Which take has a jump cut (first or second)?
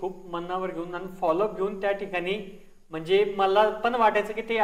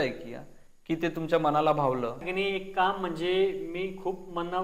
second